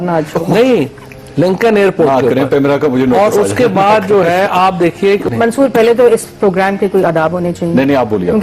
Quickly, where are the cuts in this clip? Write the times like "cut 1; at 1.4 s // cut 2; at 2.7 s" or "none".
cut 1; at 5.3 s